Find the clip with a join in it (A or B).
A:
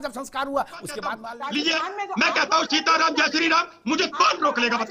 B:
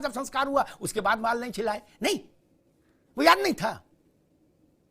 A